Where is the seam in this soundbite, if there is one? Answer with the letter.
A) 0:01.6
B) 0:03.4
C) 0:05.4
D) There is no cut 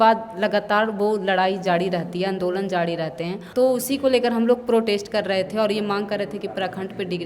B